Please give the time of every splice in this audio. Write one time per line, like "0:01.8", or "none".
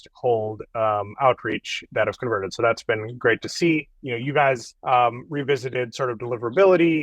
none